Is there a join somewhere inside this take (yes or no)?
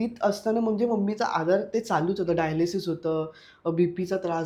no